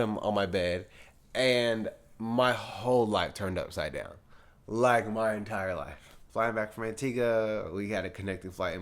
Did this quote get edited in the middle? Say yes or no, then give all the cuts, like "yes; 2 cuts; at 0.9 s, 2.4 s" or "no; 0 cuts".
yes; 1 cut; at 6.3 s